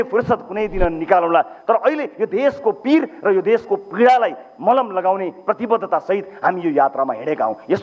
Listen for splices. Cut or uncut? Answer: uncut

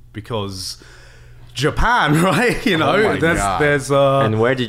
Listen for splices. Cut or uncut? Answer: uncut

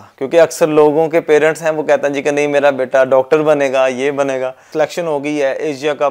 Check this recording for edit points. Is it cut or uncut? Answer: cut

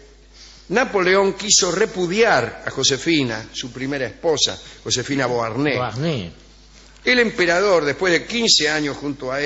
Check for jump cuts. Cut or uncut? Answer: uncut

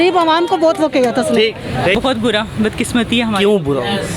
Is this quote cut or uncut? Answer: cut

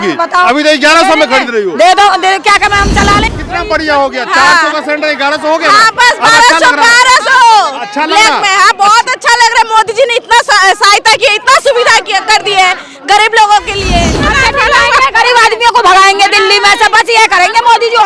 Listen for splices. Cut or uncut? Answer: cut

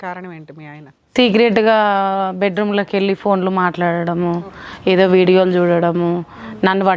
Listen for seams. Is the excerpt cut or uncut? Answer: uncut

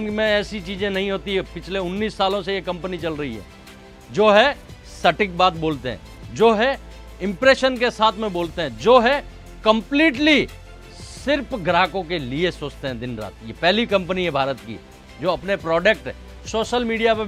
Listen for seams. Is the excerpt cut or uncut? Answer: uncut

